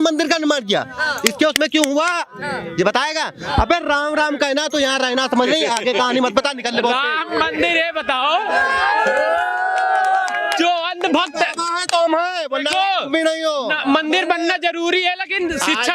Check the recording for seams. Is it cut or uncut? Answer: uncut